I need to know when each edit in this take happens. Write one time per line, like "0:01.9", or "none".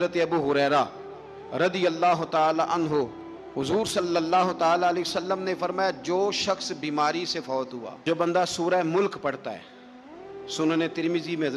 0:08.0